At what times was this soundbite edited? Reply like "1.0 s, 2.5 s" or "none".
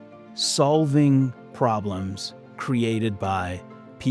none